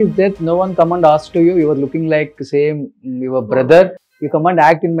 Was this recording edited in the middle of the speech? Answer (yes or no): no